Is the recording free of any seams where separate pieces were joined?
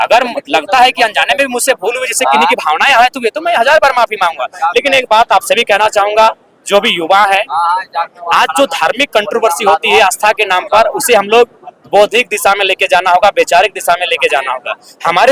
yes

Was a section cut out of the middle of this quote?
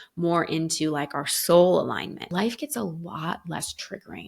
yes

